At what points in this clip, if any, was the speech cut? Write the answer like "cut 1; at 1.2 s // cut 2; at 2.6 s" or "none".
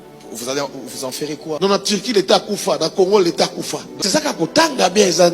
cut 1; at 3.8 s